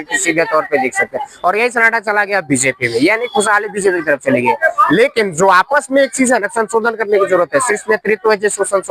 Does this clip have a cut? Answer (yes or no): no